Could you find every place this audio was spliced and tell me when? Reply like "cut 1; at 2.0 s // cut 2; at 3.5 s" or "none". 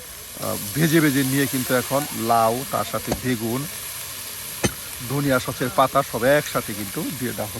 none

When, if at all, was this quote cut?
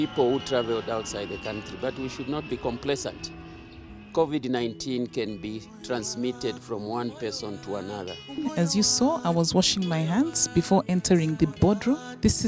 none

